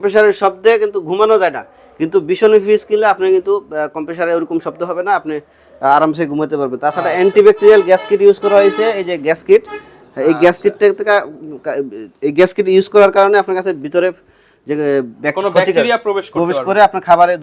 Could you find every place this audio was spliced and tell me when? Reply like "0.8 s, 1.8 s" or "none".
none